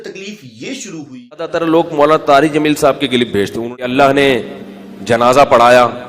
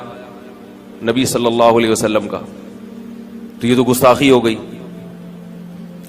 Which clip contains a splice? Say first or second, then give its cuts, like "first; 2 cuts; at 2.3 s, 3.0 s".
first; 2 cuts; at 1.5 s, 3.8 s